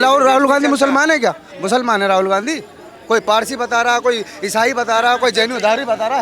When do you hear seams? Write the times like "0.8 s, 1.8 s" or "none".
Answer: none

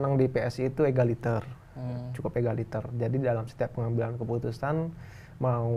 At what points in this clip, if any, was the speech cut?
none

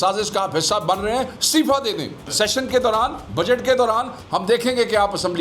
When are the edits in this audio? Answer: 2.3 s

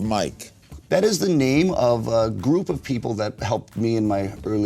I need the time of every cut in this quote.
none

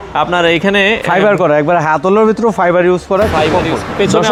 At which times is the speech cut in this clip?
none

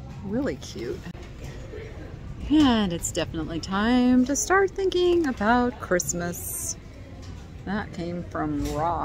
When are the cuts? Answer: 1.1 s

